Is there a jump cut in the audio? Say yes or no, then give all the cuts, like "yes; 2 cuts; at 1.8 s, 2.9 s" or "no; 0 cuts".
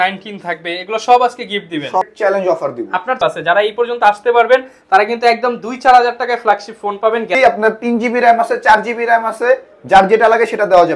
yes; 3 cuts; at 2.1 s, 3.2 s, 7.3 s